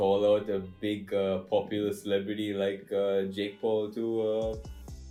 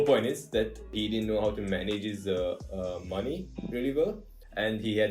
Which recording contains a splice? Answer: second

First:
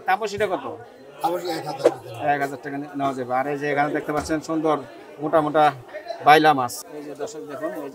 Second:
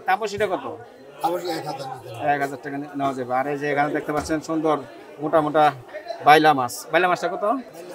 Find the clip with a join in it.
first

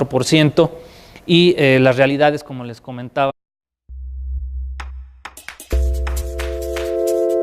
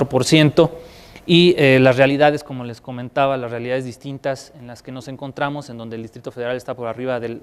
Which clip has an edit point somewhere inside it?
second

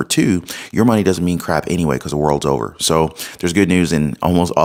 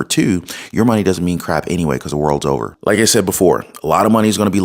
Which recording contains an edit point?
second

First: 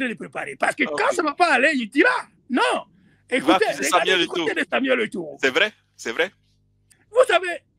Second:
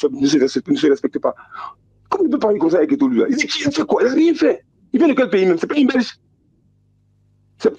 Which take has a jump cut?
first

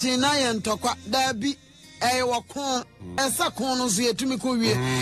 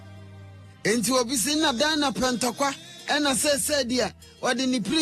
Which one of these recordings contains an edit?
first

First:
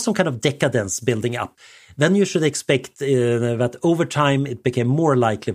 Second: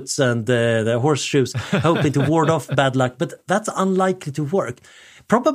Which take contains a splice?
first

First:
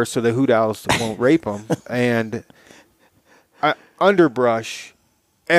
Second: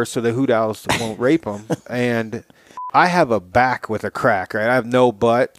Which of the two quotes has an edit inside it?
second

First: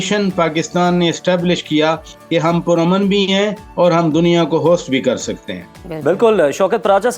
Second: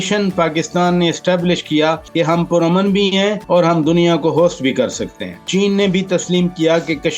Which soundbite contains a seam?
second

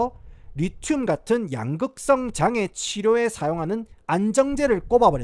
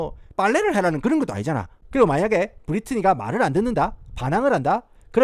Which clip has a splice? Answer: second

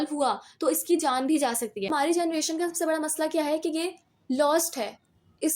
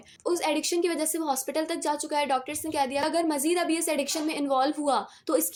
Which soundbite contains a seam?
first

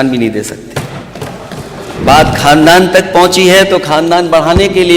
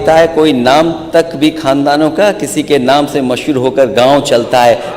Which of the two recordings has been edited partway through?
first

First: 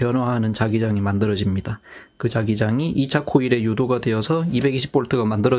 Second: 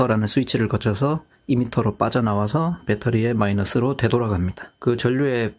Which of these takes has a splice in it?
second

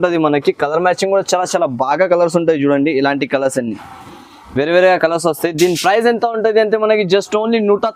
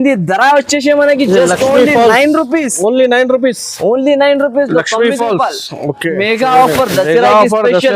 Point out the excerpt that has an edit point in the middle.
second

